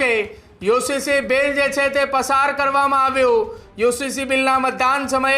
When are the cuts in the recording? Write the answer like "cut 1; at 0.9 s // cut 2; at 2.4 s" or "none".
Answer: none